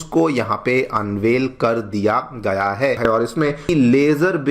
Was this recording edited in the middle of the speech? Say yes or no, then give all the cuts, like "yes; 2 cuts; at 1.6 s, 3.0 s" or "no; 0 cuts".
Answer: yes; 1 cut; at 3.0 s